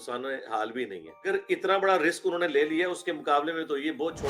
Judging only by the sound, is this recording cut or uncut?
cut